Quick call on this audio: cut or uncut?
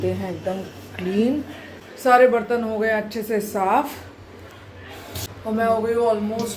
uncut